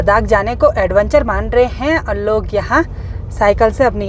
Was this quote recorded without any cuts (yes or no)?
yes